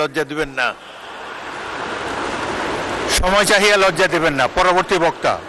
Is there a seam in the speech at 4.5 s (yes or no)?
no